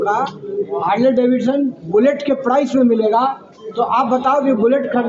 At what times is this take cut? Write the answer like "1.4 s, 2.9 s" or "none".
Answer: none